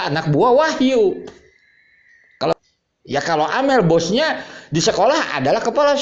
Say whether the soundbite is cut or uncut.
cut